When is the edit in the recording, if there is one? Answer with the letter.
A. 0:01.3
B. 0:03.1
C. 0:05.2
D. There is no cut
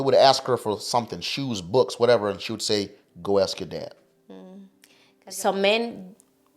C